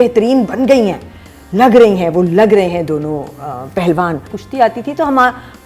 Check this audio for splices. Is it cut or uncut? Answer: cut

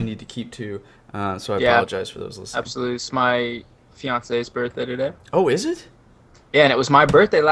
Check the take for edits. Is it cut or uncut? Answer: uncut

